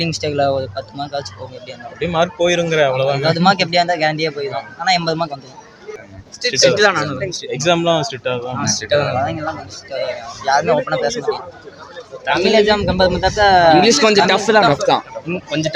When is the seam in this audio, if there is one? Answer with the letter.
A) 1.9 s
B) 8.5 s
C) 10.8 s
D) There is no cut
D